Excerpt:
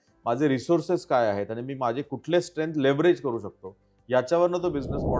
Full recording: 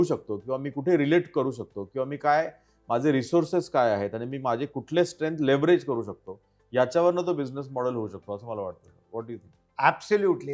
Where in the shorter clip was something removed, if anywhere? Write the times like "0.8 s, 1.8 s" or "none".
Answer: none